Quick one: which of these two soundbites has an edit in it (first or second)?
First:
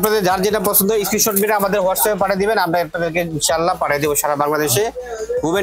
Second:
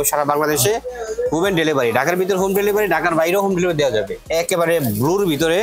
second